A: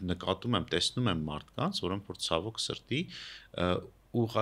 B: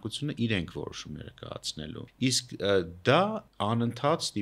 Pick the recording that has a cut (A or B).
B